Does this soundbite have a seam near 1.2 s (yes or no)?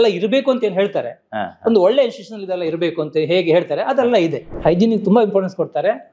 no